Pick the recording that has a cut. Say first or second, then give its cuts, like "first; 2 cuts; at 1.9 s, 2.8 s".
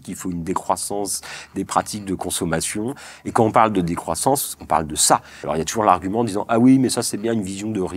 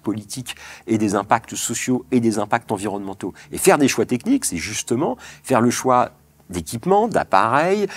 first; 1 cut; at 5.5 s